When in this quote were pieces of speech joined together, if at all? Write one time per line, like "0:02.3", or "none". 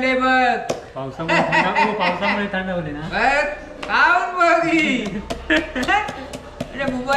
none